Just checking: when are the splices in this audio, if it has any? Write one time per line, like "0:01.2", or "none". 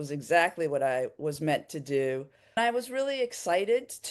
0:02.6